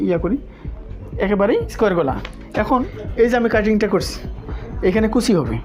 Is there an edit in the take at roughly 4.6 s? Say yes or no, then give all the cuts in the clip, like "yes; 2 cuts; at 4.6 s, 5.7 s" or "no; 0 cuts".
no; 2 cuts; at 1.7 s, 3.0 s